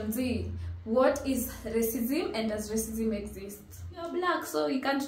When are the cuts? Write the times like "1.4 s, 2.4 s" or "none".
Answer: 4.1 s